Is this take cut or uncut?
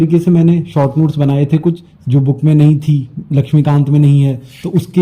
cut